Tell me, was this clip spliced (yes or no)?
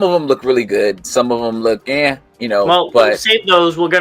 no